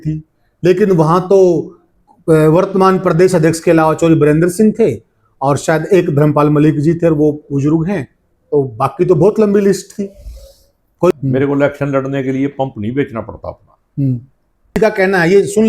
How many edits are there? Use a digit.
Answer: 2